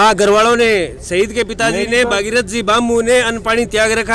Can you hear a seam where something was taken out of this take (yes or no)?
no